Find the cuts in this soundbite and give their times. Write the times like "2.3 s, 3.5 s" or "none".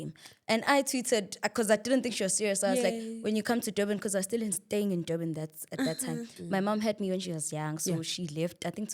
6.3 s